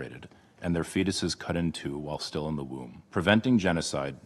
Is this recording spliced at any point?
yes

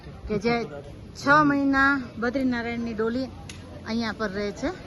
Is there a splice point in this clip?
no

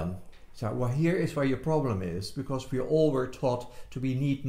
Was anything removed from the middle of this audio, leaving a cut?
no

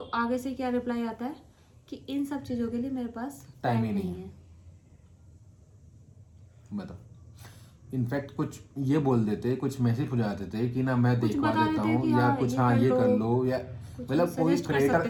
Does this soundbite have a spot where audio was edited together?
no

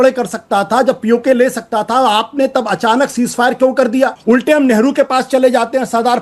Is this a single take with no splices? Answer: no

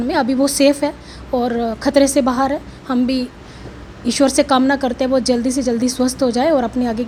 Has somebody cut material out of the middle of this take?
no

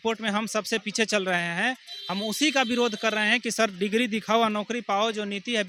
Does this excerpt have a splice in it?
no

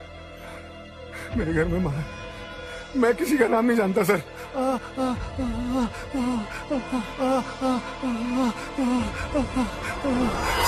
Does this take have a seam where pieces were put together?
no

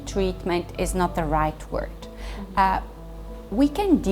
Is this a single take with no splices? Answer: yes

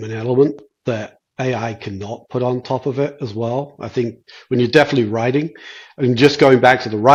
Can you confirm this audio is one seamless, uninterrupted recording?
yes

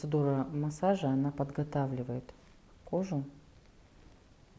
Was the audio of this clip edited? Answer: no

